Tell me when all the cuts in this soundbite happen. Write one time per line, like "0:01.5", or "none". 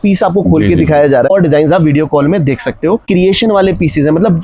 0:01.3
0:03.0